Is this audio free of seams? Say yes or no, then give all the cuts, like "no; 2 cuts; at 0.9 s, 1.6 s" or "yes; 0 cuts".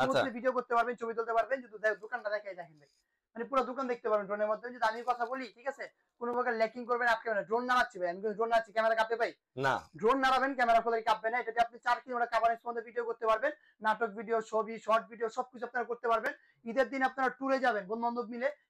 yes; 0 cuts